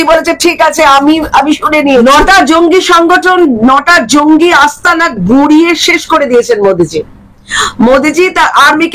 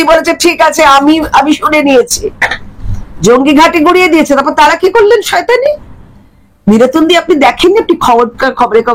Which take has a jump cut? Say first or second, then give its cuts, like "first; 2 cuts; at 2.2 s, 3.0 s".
first; 1 cut; at 2.0 s